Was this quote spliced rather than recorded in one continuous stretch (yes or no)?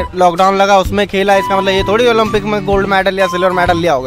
no